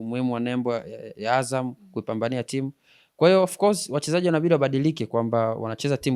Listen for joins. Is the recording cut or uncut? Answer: uncut